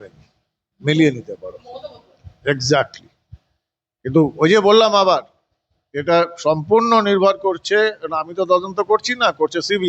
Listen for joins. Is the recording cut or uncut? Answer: uncut